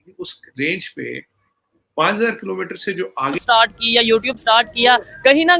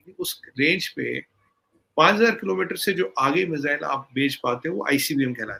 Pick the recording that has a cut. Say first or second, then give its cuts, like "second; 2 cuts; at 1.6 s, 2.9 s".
first; 1 cut; at 3.4 s